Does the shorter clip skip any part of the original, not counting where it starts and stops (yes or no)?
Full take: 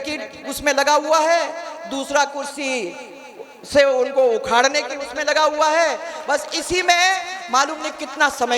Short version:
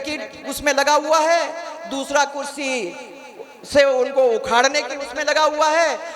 no